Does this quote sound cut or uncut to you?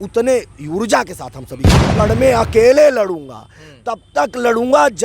cut